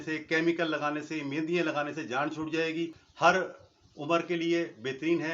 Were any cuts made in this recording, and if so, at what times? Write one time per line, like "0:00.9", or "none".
0:03.0